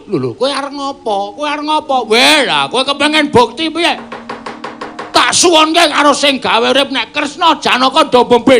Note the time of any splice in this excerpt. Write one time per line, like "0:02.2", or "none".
0:07.0